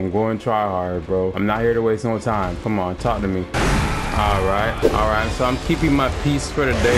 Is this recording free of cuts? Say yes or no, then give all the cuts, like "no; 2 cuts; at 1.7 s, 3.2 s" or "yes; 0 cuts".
no; 4 cuts; at 1.3 s, 2.6 s, 3.5 s, 4.8 s